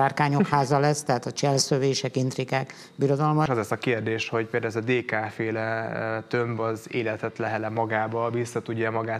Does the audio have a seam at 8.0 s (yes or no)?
no